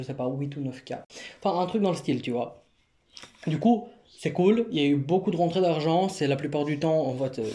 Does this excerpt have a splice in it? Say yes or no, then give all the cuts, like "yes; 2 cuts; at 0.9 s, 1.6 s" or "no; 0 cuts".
no; 0 cuts